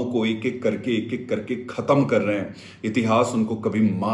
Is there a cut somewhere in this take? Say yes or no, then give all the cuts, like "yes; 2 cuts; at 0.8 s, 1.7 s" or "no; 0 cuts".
no; 0 cuts